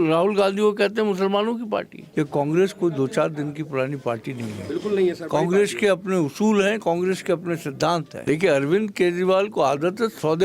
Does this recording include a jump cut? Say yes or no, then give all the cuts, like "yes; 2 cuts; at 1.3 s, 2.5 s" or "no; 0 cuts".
yes; 2 cuts; at 2.0 s, 8.1 s